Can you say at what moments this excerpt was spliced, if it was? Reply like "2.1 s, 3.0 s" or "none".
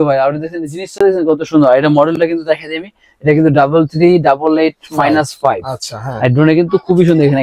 none